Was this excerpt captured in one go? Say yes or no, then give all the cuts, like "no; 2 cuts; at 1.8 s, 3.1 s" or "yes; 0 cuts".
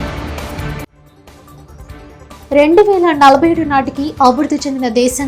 no; 2 cuts; at 1.0 s, 2.4 s